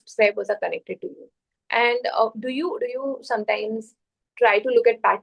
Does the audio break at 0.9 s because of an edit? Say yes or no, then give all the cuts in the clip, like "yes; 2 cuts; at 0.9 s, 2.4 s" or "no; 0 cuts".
no; 0 cuts